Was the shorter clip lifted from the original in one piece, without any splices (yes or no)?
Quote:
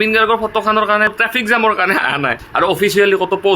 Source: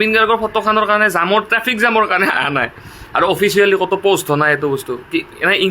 no